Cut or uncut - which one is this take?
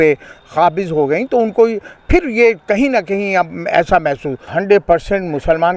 cut